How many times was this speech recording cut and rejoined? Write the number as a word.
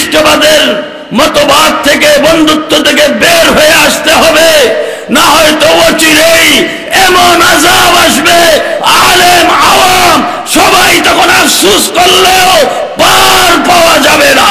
zero